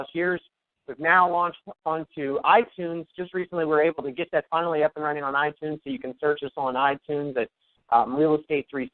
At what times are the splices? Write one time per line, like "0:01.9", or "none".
0:06.1